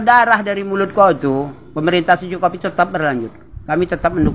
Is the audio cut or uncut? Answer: uncut